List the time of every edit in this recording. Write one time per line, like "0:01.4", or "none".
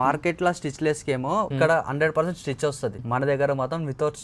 0:01.5
0:03.0